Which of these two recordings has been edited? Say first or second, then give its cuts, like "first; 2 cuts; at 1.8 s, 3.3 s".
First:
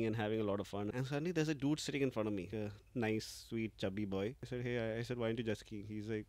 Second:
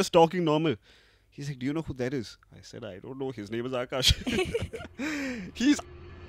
first; 3 cuts; at 0.9 s, 2.6 s, 4.5 s